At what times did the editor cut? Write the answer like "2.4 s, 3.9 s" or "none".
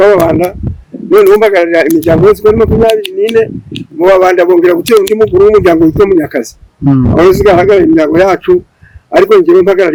none